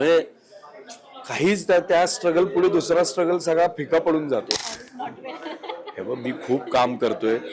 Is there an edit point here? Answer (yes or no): yes